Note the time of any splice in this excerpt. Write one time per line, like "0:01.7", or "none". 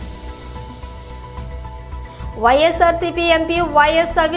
0:00.9